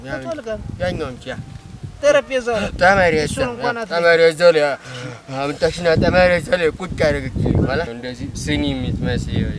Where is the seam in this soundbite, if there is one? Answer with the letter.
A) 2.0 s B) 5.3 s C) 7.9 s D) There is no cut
C